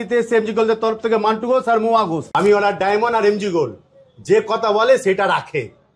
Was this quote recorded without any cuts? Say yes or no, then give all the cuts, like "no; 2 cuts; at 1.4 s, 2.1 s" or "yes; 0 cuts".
no; 1 cut; at 2.2 s